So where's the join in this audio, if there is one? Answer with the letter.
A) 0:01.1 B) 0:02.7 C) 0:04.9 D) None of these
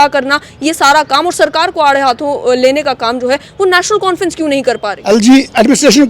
C